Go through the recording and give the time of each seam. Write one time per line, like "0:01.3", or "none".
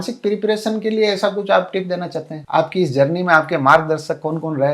0:02.4